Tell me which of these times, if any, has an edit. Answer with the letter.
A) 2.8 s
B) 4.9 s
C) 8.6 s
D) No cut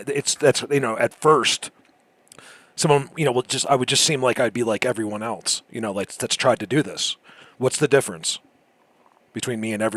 D